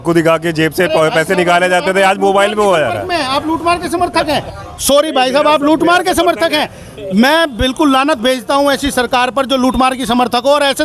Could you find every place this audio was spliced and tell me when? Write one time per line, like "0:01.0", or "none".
none